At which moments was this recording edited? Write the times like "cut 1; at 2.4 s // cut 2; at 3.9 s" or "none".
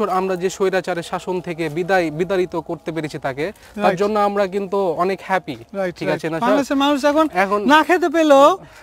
none